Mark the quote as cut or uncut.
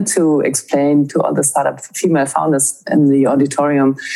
cut